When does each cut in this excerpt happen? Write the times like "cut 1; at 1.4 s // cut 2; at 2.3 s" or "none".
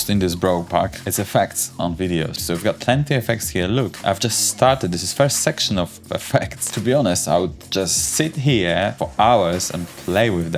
cut 1; at 2.4 s // cut 2; at 6.7 s // cut 3; at 9.0 s

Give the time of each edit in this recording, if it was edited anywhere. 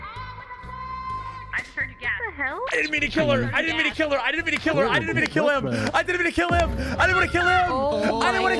none

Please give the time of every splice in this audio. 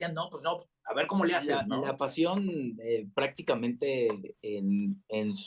cut 1; at 1.7 s

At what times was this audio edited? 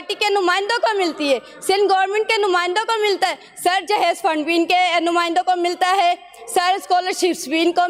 none

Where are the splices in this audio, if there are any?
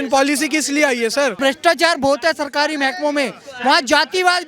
cut 1; at 1.4 s

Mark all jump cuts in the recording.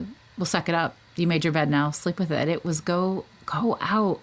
none

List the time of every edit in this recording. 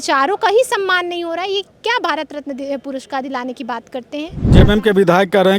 cut 1; at 4.5 s

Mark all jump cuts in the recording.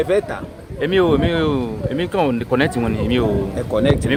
none

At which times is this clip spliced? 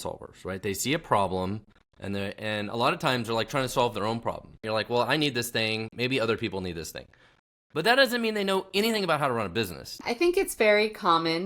cut 1; at 4.6 s // cut 2; at 10.0 s

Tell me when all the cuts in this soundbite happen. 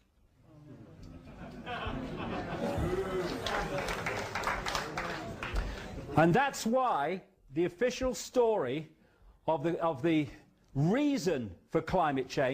none

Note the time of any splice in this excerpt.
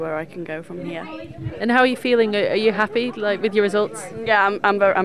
none

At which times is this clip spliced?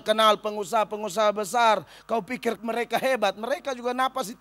cut 1; at 2.6 s

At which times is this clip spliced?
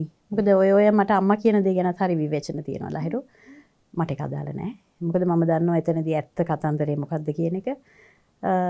none

